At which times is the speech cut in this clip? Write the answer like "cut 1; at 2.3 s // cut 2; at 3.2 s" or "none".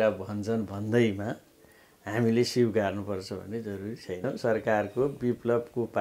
cut 1; at 4.2 s

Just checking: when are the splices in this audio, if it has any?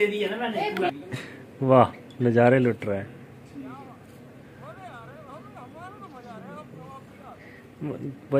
cut 1; at 0.9 s

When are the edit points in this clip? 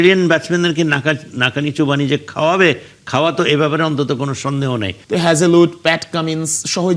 cut 1; at 5.0 s

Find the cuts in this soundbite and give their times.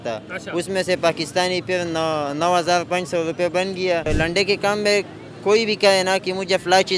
cut 1; at 4.1 s

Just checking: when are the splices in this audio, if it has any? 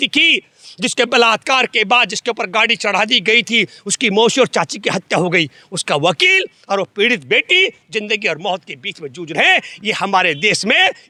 none

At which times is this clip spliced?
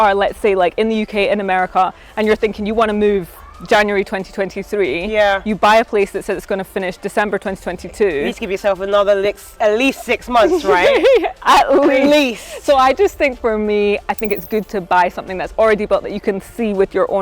none

